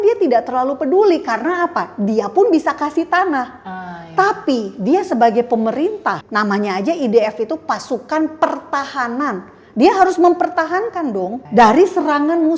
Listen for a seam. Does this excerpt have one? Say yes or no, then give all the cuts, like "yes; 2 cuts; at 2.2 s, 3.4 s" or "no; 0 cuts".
yes; 2 cuts; at 6.2 s, 11.4 s